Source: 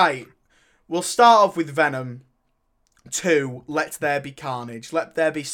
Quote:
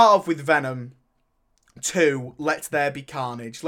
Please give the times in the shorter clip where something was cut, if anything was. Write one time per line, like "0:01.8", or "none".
none